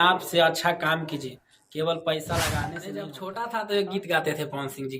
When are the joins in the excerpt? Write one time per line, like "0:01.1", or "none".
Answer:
0:03.2

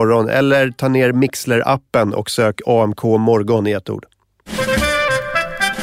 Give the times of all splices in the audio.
0:04.4

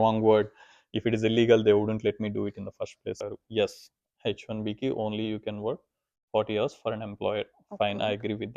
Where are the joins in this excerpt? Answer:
0:03.2

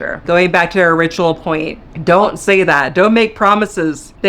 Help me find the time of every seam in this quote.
0:01.9

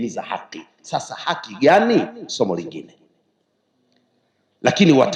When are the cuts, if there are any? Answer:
none

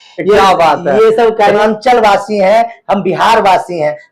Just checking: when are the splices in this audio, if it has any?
0:01.6

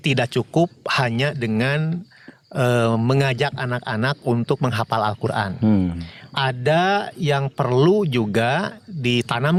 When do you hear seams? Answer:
none

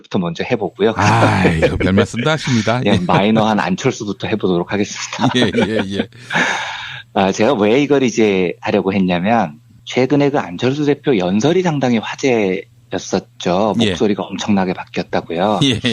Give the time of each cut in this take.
0:14.1

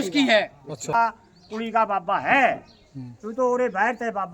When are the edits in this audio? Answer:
0:00.9

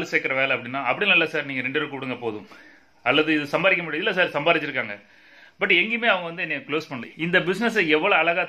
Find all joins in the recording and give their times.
0:07.0

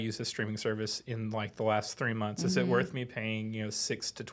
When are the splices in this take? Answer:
none

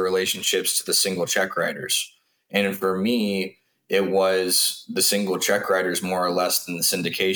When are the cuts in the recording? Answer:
none

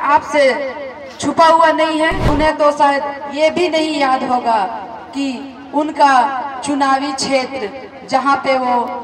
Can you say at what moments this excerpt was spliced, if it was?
0:02.3

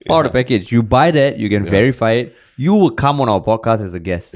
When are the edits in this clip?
none

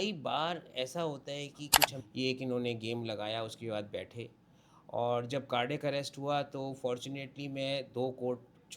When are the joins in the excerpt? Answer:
0:01.9

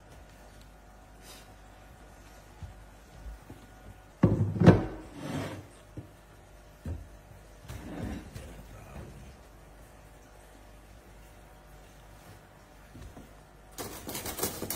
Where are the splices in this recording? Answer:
0:04.0

